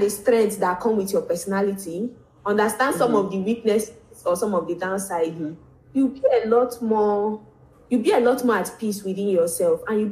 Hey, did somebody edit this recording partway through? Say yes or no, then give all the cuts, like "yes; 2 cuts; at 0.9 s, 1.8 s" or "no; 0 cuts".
no; 0 cuts